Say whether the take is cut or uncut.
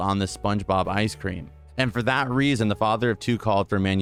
uncut